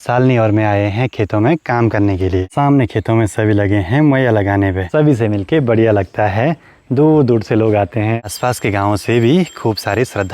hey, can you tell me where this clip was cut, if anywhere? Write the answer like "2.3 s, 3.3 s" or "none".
2.5 s, 4.8 s, 8.2 s